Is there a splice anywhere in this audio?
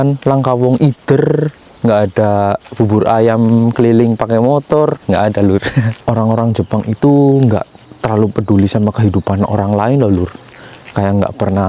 yes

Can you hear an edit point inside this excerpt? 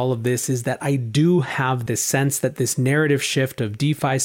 yes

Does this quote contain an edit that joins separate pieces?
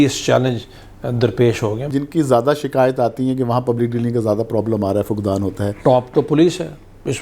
yes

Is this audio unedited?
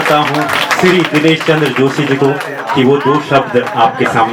yes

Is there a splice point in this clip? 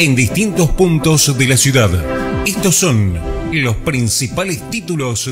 no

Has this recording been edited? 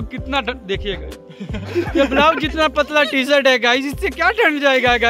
no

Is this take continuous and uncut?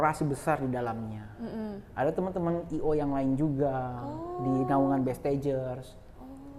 yes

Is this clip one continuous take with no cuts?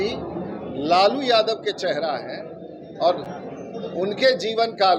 yes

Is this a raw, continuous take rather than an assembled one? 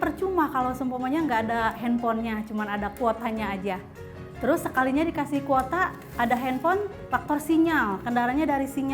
no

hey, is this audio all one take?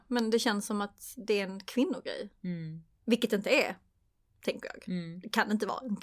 yes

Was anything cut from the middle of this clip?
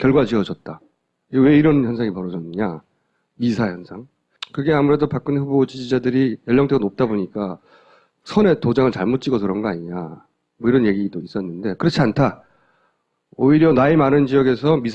yes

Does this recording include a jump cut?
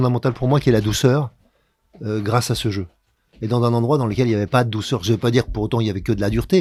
no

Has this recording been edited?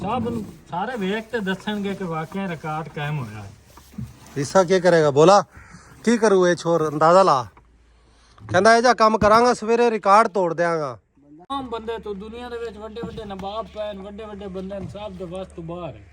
yes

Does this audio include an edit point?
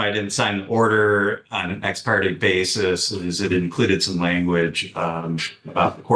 no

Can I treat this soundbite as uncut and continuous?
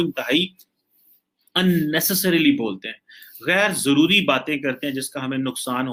yes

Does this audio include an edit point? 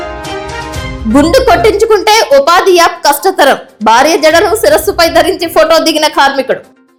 no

